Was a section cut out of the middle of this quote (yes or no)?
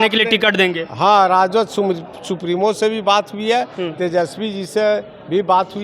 no